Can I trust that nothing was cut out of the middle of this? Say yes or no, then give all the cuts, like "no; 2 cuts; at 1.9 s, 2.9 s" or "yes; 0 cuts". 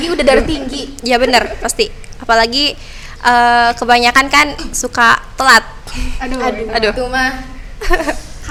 yes; 0 cuts